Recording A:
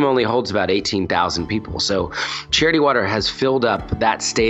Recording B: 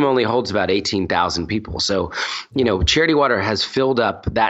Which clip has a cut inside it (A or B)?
A